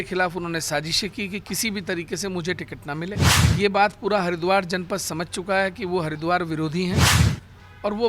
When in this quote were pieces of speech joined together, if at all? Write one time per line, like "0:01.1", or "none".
0:03.3